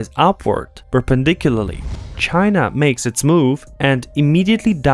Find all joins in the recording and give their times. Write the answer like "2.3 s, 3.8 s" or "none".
2.2 s